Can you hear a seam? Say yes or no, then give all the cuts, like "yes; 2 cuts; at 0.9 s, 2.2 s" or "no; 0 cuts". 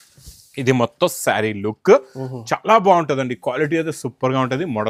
no; 0 cuts